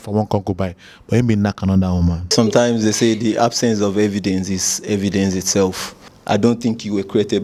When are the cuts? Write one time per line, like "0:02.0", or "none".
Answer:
0:02.2